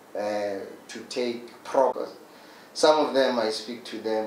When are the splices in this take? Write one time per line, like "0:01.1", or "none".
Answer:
0:02.0